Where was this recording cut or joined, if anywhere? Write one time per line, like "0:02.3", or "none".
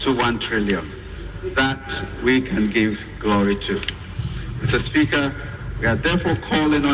none